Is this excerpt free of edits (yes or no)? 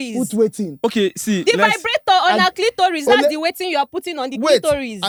yes